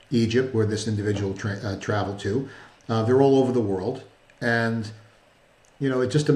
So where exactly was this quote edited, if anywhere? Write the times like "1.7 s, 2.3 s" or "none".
none